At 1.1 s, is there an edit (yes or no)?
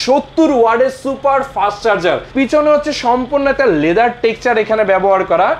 no